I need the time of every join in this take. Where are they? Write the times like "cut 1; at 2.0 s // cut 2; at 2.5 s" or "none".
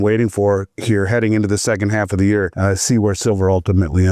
cut 1; at 2.5 s